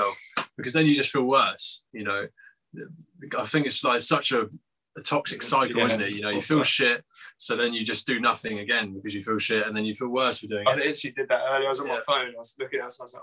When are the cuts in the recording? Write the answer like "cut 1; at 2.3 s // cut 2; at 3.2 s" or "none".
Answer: none